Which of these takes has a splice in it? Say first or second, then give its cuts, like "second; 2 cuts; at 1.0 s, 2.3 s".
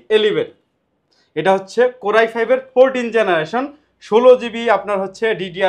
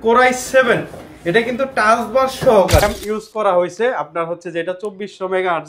second; 1 cut; at 2.8 s